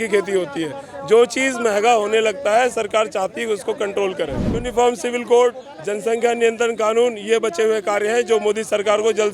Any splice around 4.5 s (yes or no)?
yes